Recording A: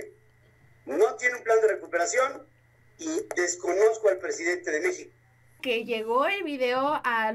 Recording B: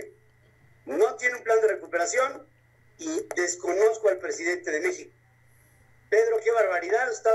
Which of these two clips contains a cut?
A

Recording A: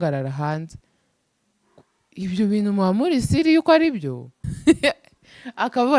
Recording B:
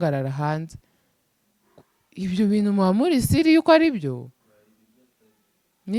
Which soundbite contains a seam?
A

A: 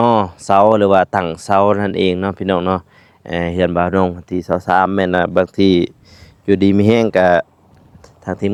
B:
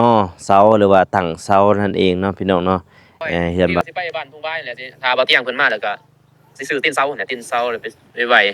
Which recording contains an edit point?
B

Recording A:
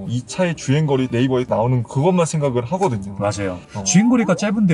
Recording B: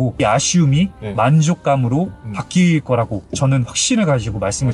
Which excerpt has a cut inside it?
A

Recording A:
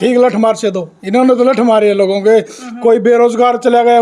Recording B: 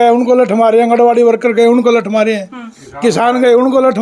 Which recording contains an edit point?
A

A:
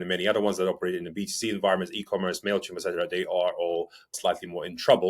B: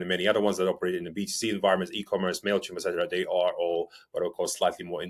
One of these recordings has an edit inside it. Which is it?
A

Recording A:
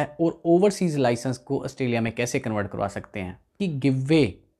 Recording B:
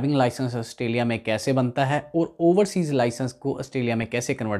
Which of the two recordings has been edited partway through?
A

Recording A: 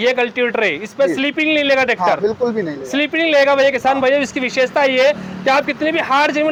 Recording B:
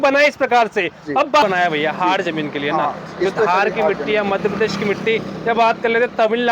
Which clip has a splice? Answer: B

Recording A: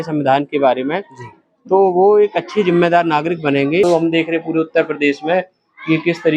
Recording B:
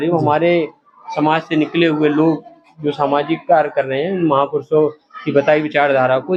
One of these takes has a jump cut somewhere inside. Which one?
A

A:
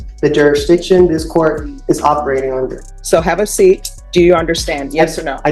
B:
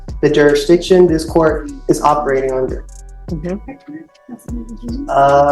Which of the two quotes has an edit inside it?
A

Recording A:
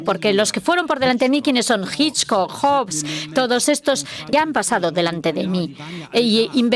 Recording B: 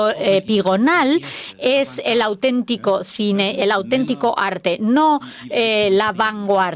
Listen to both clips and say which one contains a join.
A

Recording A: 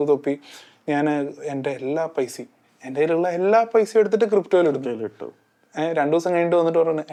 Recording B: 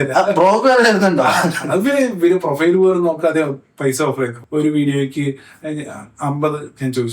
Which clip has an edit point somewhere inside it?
B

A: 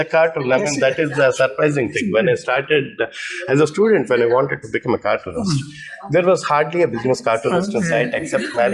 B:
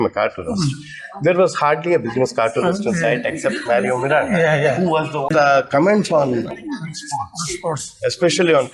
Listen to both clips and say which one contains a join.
B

